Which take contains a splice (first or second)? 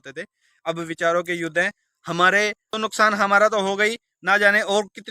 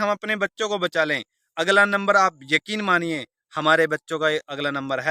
first